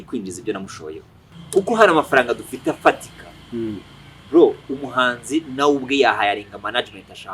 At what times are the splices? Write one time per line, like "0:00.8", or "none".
0:01.3